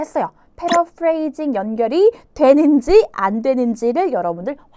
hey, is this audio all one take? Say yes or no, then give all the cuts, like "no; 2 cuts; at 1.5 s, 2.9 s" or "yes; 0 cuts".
yes; 0 cuts